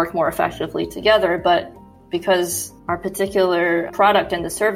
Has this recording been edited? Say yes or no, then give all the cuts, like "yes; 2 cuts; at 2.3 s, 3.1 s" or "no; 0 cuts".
no; 0 cuts